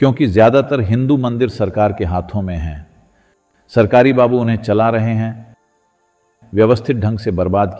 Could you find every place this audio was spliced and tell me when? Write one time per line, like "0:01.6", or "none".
none